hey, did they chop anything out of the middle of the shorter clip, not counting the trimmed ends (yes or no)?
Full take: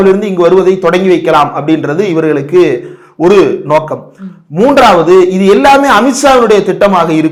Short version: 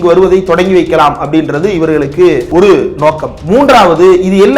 yes